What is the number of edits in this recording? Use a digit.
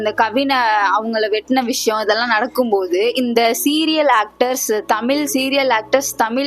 0